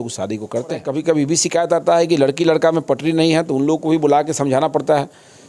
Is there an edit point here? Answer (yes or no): yes